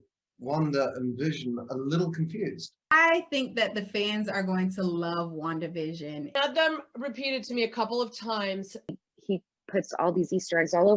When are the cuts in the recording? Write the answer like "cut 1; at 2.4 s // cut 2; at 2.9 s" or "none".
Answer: cut 1; at 2.9 s // cut 2; at 6.3 s // cut 3; at 9.0 s